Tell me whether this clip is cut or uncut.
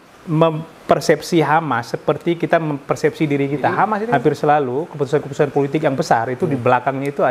cut